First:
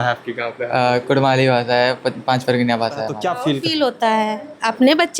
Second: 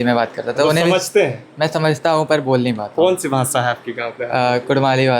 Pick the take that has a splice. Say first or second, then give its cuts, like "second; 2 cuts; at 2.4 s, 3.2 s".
first; 1 cut; at 3.2 s